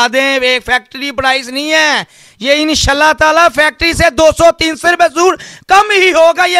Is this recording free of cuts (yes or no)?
yes